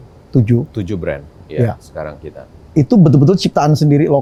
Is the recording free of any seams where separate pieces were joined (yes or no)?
yes